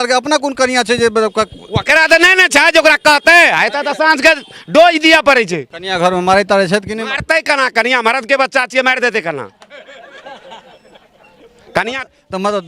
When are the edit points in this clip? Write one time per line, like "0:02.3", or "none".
0:05.8